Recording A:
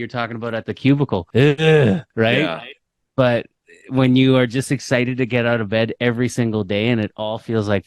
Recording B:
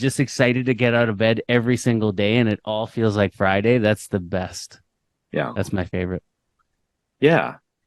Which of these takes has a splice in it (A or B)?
A